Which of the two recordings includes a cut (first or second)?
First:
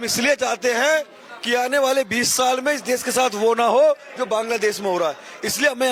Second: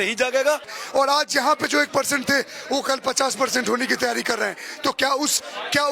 second